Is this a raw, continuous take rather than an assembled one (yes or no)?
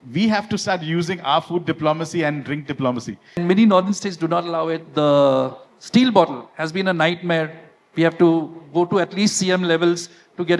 no